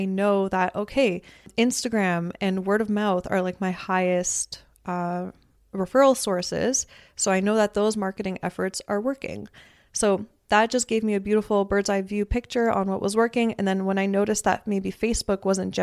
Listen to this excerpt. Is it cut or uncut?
cut